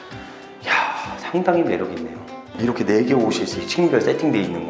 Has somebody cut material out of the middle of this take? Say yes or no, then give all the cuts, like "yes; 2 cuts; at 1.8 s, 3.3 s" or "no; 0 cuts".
yes; 1 cut; at 2.5 s